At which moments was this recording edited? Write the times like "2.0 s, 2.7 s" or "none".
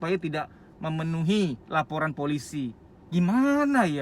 1.6 s